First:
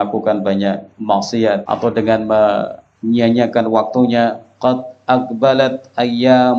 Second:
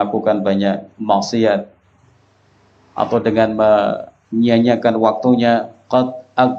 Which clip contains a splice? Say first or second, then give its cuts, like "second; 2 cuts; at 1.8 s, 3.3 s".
first; 1 cut; at 1.6 s